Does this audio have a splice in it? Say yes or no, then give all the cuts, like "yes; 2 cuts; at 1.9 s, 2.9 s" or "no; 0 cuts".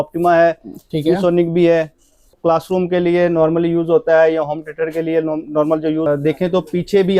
yes; 2 cuts; at 2.4 s, 6.1 s